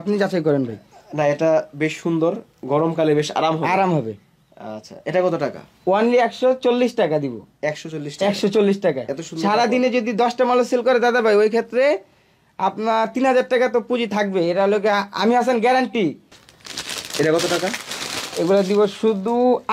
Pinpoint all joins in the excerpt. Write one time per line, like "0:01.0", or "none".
0:16.3